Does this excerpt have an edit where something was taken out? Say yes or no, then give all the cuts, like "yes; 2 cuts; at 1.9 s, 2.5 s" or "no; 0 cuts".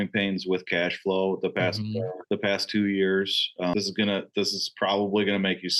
no; 0 cuts